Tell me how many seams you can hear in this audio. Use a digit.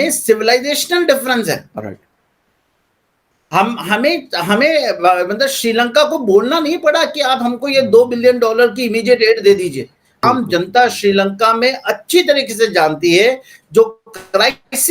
1